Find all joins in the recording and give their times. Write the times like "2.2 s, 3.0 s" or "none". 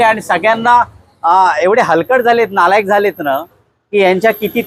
none

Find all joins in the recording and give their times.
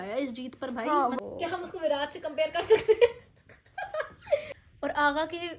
1.2 s, 4.5 s

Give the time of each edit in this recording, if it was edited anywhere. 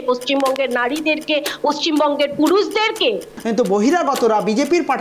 3.3 s

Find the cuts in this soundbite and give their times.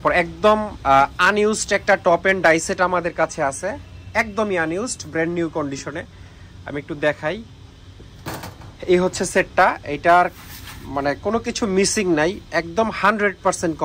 none

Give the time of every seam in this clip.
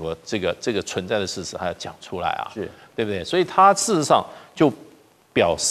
none

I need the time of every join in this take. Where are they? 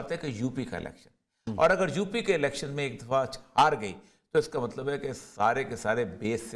none

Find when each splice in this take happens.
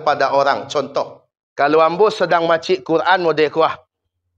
0.9 s

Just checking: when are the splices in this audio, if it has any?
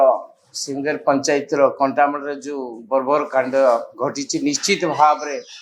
none

